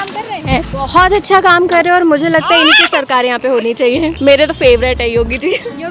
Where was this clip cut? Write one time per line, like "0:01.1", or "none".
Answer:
0:04.1